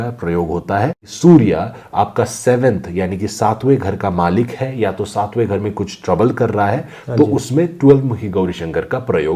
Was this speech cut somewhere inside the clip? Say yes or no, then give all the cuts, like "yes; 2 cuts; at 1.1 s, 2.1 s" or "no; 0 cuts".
yes; 1 cut; at 1.1 s